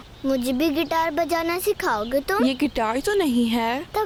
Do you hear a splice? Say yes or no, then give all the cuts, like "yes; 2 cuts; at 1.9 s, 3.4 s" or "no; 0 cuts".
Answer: no; 0 cuts